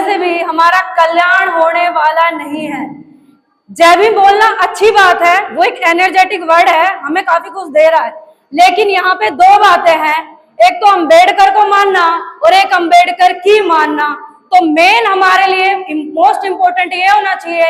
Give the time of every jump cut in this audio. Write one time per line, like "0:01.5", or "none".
none

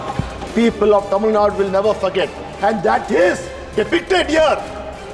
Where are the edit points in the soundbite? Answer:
none

